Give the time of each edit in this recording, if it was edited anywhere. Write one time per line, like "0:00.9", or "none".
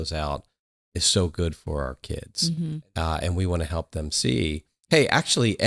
0:02.4